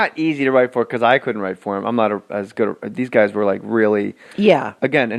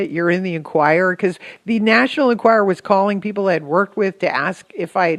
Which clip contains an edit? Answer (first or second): first